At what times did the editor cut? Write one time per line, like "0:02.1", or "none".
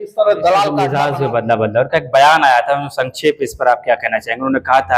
0:00.9